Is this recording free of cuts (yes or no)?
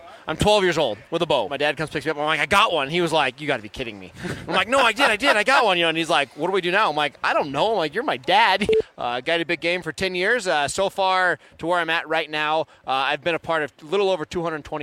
no